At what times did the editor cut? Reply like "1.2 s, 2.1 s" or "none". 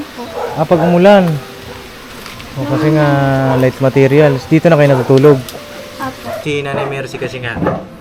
6.4 s